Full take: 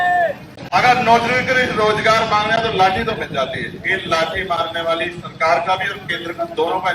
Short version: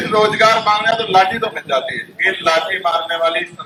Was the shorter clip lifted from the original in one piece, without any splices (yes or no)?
yes